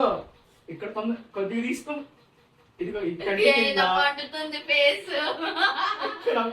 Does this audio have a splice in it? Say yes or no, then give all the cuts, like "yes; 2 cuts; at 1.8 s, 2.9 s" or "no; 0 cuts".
no; 0 cuts